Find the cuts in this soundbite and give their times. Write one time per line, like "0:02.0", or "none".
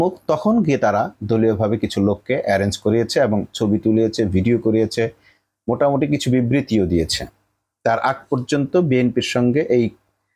none